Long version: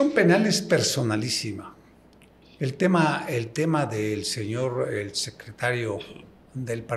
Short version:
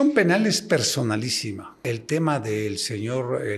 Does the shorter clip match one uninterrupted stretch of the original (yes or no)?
no